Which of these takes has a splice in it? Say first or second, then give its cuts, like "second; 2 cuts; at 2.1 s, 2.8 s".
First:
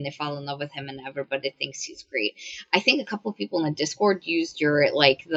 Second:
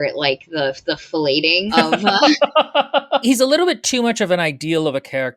second; 2 cuts; at 1.7 s, 3.2 s